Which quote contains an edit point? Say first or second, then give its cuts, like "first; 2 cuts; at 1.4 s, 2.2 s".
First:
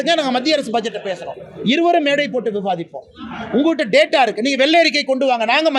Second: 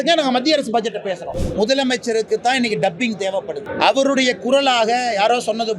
second; 2 cuts; at 1.3 s, 3.7 s